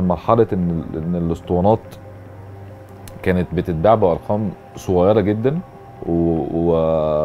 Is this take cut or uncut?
uncut